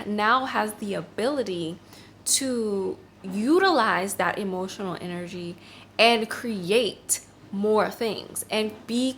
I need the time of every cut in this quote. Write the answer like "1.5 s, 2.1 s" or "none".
none